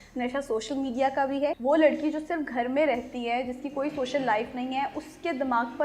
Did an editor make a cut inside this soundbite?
yes; 1 cut; at 1.6 s

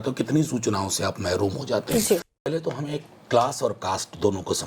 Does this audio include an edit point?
yes; 1 cut; at 2.4 s

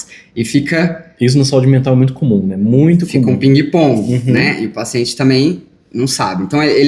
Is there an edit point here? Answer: no; 0 cuts

